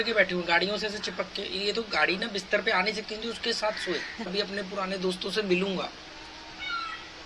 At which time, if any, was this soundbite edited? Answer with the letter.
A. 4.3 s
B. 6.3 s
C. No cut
A